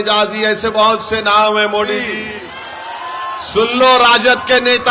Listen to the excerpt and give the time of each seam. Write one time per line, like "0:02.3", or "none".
0:02.2